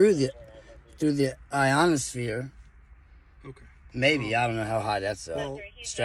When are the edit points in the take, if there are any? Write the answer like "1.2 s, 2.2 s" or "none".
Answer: 2.9 s